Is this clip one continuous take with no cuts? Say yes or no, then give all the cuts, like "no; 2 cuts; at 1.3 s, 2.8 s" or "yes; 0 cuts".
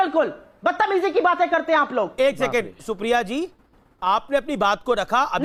yes; 0 cuts